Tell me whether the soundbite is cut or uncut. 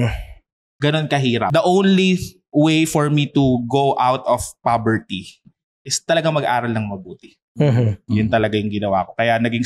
cut